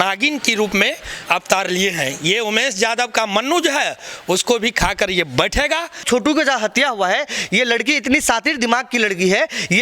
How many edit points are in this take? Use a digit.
1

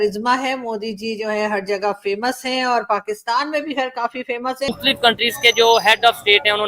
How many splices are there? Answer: 1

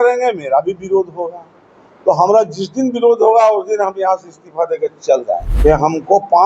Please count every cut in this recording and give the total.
1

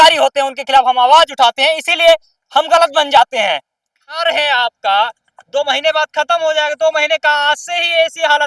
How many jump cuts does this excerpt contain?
1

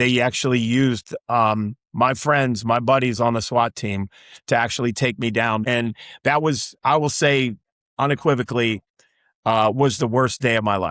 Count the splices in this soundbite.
1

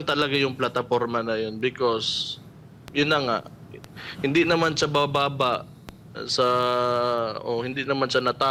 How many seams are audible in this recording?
0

